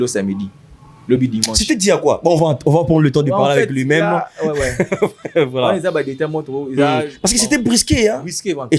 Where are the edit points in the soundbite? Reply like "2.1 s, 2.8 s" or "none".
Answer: none